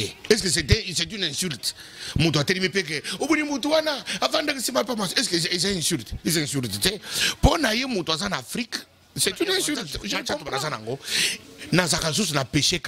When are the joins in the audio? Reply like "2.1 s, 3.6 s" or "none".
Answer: 10.5 s